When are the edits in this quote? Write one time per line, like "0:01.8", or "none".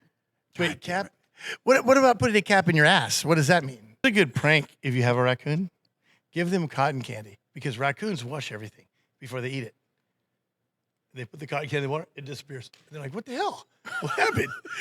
0:04.0